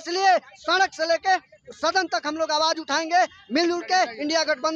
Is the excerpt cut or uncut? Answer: uncut